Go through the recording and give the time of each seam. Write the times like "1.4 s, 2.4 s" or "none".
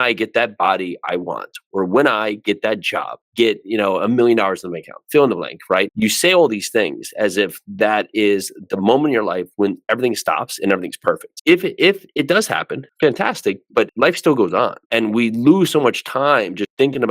3.1 s